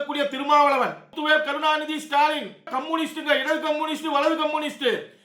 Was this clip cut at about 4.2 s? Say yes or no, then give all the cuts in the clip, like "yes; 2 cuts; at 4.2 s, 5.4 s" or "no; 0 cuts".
no; 2 cuts; at 1.1 s, 2.7 s